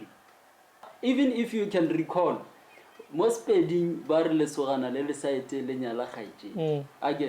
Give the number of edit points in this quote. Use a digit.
1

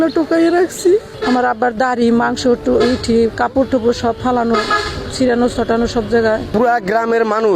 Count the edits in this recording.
2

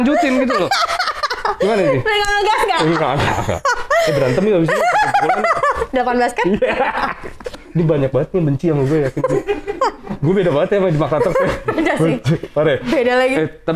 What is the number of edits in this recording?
1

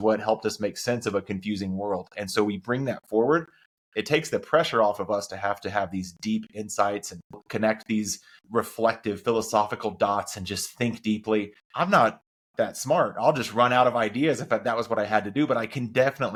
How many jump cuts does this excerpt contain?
0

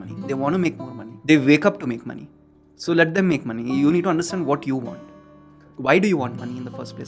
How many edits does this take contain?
1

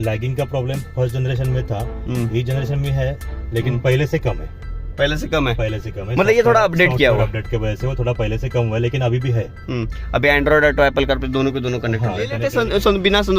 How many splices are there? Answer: 1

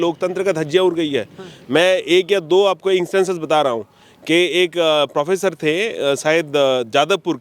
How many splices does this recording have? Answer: 0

